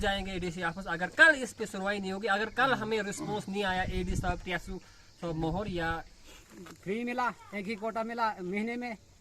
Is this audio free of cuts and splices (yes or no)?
no